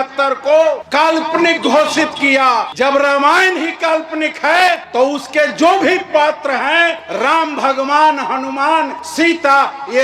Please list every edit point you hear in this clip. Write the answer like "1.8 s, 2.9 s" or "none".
0.8 s, 2.7 s, 4.8 s, 7.0 s, 9.0 s